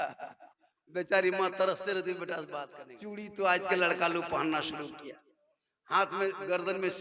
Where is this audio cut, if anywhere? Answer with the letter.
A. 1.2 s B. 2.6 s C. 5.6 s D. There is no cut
B